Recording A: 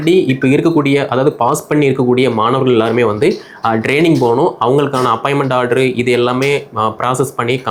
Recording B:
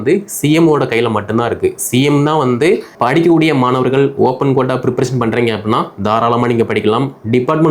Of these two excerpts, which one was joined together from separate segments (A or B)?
B